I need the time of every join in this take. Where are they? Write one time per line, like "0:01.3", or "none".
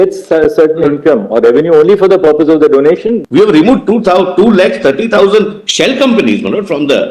0:03.2